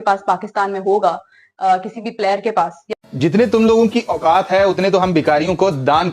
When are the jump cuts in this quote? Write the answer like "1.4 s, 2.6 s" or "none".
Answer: 2.9 s